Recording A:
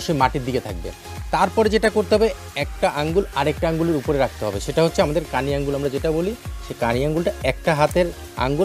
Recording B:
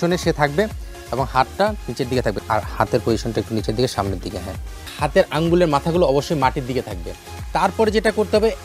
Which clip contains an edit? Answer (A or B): B